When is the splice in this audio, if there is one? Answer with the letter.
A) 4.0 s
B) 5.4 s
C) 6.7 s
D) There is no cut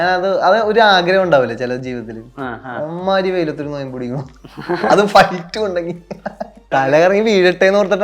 C